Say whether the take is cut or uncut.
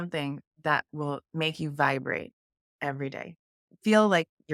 uncut